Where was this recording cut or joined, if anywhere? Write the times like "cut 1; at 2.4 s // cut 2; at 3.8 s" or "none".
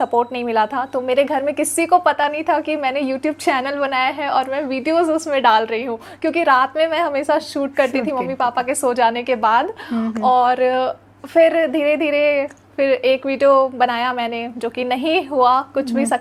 none